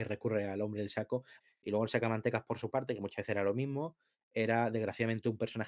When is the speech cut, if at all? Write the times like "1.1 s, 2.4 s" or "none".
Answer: 1.3 s